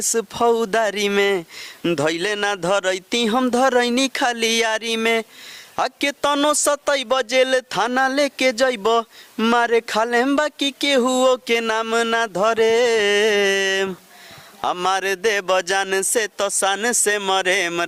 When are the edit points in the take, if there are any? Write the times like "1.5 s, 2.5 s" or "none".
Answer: none